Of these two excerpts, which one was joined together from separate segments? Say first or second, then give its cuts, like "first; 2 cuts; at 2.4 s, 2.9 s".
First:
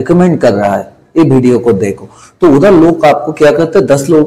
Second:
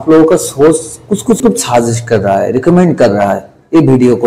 second; 1 cut; at 1.4 s